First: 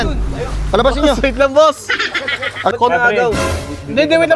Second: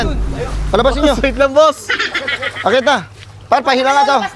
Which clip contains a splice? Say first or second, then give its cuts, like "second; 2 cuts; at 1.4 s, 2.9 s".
first; 1 cut; at 2.7 s